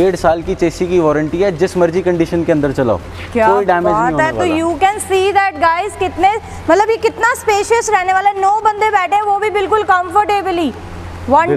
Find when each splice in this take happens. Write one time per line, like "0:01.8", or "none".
none